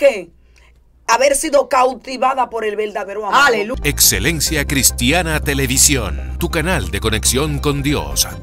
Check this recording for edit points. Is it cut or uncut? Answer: cut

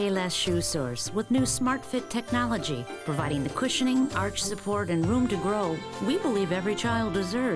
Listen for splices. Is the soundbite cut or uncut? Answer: uncut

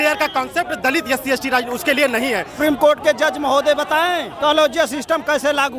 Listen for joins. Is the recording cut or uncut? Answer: cut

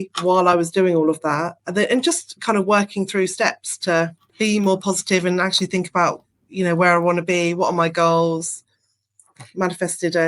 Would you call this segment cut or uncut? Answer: cut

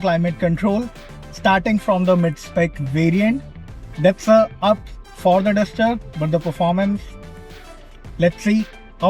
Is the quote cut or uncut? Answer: uncut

